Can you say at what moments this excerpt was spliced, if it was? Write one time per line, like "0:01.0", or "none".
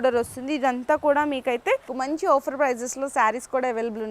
0:01.9